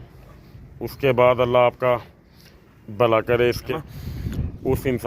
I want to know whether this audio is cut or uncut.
cut